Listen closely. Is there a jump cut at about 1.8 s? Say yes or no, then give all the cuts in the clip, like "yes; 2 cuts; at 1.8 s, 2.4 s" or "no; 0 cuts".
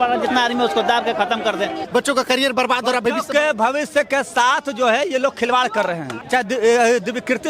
yes; 2 cuts; at 1.8 s, 6.1 s